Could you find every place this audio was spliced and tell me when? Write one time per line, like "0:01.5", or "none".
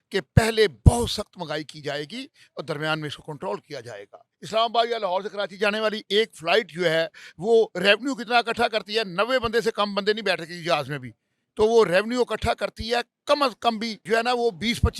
0:04.4
0:13.9